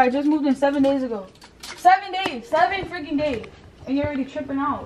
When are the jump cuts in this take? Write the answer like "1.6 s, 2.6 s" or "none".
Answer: none